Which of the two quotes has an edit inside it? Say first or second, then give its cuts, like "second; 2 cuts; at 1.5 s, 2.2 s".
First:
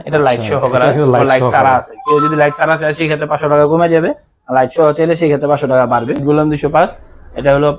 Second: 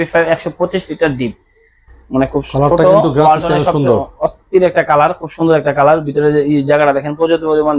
first; 1 cut; at 6.2 s